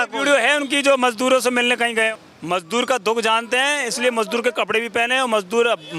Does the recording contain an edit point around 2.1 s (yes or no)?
yes